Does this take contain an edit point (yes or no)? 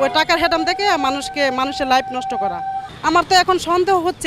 yes